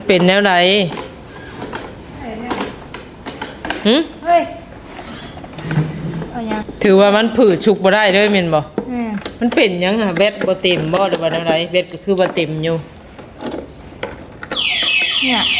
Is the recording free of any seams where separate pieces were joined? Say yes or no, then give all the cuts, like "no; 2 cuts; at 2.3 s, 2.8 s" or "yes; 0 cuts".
yes; 0 cuts